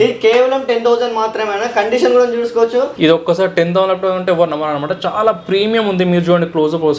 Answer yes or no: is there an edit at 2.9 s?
yes